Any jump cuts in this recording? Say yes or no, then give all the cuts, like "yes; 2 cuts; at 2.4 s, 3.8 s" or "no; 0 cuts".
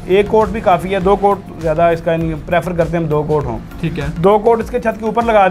no; 0 cuts